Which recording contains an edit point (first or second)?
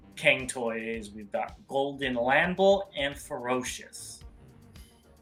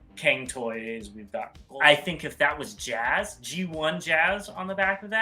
second